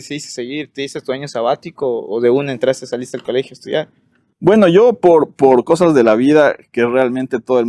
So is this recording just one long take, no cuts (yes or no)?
yes